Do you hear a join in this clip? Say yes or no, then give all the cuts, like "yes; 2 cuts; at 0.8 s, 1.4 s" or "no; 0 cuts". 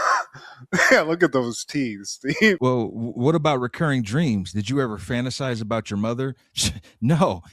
yes; 1 cut; at 2.6 s